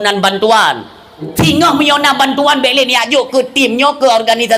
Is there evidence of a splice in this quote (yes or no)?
yes